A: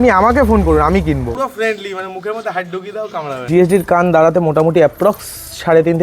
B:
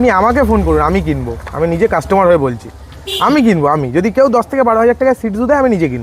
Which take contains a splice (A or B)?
A